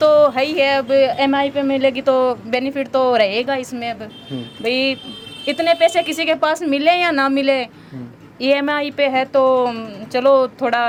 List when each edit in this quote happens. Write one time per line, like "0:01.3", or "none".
none